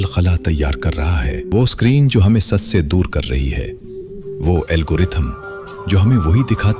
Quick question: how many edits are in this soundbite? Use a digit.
1